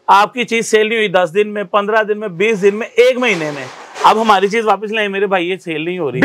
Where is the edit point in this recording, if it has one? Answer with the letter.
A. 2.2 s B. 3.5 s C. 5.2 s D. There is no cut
D